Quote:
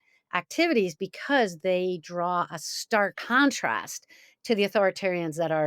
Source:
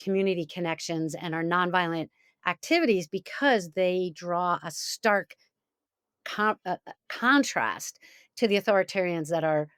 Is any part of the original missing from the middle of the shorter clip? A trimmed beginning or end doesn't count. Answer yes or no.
yes